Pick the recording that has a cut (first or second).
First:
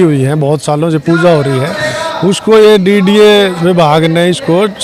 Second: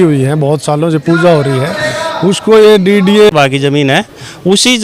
second